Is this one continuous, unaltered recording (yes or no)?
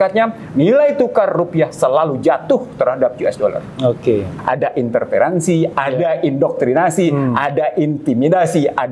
no